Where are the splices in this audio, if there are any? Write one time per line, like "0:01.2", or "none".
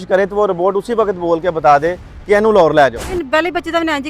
0:03.1